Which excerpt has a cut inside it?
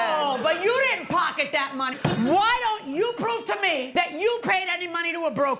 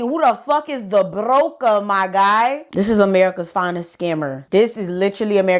first; 1 cut; at 1.9 s

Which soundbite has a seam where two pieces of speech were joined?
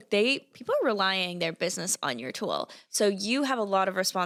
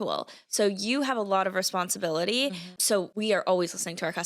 second; 1 cut; at 2.9 s

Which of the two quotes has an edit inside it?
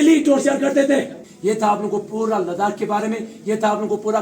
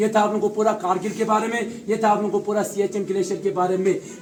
first; 1 cut; at 1.2 s

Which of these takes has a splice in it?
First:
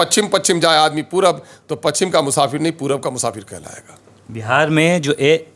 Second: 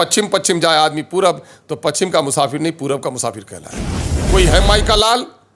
second; 1 cut; at 4.1 s

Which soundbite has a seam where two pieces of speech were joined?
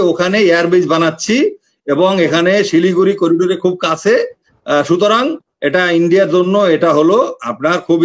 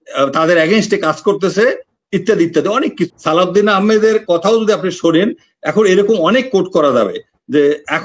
second; 1 cut; at 3.1 s

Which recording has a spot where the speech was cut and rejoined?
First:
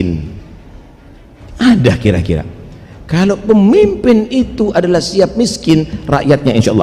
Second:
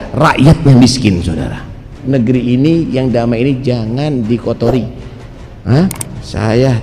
second; 1 cut; at 2.0 s

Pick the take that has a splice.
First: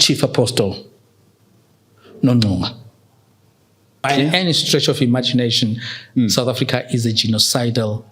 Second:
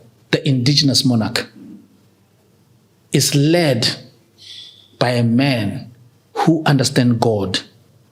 first; 1 cut; at 4.1 s

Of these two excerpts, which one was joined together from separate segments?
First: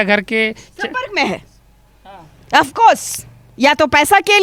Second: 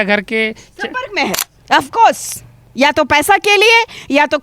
second; 1 cut; at 1.5 s

